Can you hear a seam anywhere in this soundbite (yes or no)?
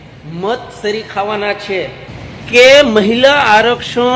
yes